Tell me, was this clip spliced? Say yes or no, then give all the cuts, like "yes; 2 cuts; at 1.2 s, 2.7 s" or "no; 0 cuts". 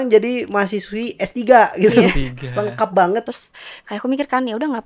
yes; 1 cut; at 3.3 s